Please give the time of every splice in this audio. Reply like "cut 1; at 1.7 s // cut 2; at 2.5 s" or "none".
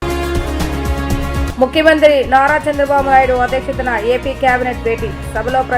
cut 1; at 1.5 s